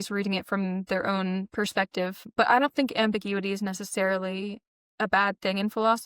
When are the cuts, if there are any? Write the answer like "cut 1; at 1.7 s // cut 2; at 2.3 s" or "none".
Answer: cut 1; at 2.2 s